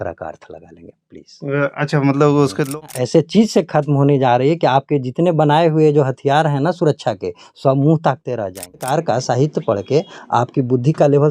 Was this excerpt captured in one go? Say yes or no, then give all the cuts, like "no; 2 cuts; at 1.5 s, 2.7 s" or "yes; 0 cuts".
no; 2 cuts; at 2.7 s, 8.9 s